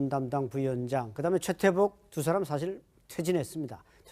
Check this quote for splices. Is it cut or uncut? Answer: uncut